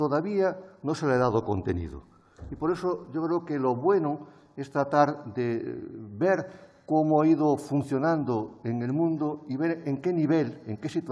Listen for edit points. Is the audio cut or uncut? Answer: cut